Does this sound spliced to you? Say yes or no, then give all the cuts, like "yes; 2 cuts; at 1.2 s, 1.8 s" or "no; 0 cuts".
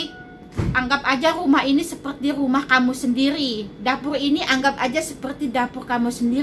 no; 0 cuts